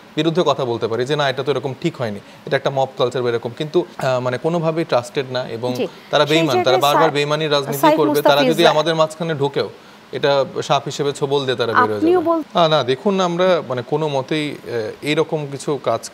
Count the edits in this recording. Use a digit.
2